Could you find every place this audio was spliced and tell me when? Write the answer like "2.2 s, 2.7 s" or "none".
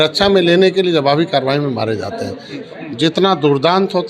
2.6 s